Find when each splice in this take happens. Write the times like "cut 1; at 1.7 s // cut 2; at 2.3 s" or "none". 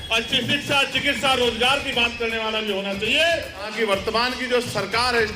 cut 1; at 3.7 s